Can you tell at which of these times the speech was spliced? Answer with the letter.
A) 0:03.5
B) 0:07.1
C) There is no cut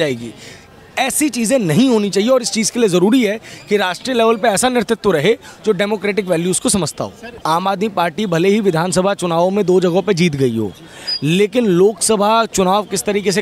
B